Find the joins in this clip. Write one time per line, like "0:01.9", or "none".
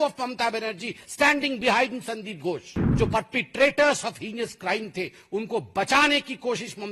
0:02.8